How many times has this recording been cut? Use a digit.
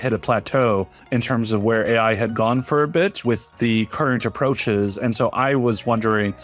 1